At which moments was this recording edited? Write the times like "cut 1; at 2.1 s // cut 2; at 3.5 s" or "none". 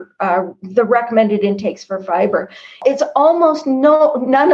cut 1; at 2.8 s